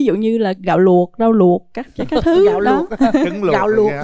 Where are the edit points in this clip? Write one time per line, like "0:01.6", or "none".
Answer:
none

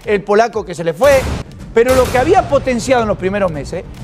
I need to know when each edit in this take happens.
0:01.4

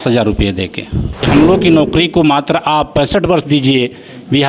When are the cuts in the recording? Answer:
0:01.2

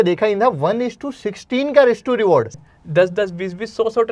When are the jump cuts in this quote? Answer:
0:02.7

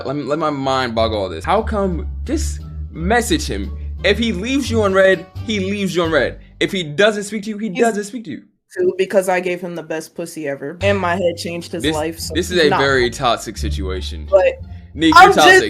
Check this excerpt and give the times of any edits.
none

